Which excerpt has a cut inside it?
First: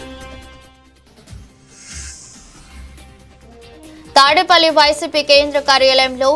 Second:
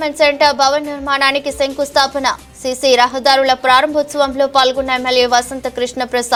first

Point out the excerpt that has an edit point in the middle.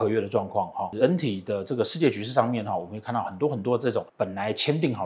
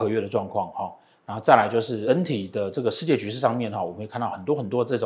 first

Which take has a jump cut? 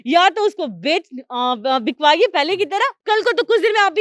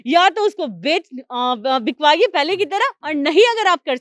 first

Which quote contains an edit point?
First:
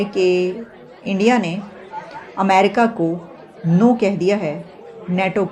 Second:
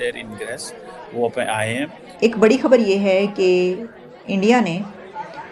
second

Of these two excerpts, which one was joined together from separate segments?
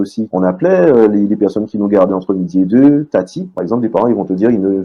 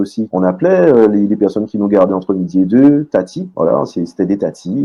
first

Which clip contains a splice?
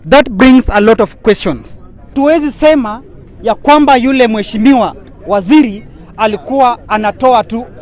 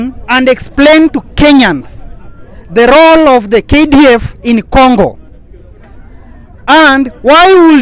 first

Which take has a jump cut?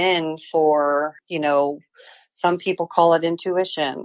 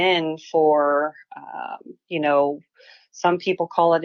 first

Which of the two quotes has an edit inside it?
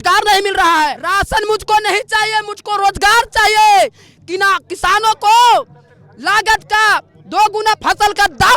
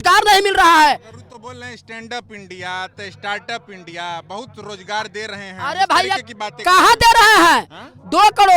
first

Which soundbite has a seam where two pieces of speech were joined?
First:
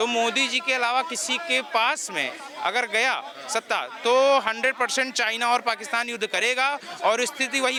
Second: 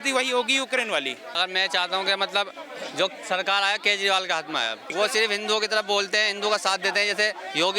second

